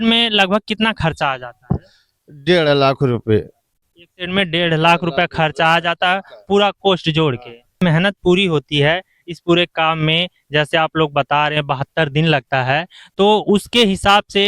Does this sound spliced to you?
yes; 1 cut; at 7.8 s

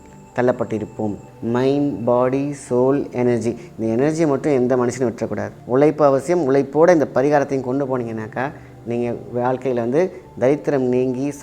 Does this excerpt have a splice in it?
yes; 2 cuts; at 1.3 s, 5.5 s

